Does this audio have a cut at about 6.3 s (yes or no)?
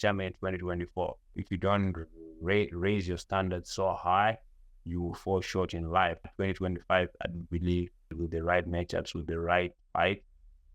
yes